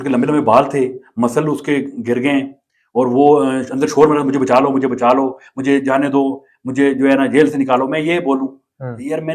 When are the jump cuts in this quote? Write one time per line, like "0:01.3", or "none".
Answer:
none